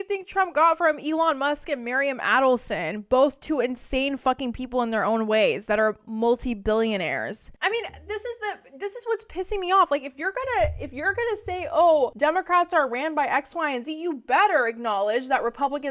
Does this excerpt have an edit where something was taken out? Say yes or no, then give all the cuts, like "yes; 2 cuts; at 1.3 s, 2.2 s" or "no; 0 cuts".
no; 0 cuts